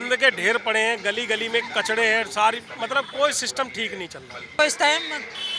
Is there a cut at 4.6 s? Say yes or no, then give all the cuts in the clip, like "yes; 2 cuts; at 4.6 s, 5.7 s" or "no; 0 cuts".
yes; 1 cut; at 4.6 s